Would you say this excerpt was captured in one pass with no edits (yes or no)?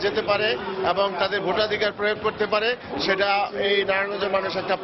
yes